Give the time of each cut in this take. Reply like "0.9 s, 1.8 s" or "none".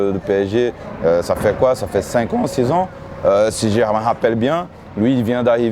none